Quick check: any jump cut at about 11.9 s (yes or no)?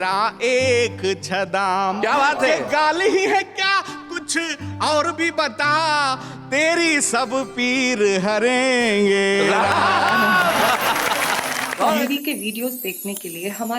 yes